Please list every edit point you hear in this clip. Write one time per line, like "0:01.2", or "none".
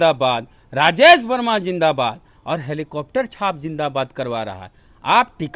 none